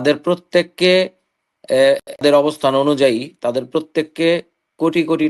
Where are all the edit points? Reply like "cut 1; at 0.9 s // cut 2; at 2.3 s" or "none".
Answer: cut 1; at 2.2 s